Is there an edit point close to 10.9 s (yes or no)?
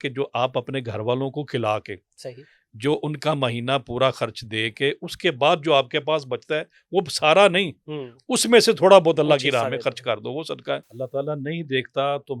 yes